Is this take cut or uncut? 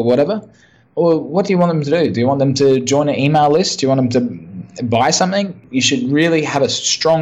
cut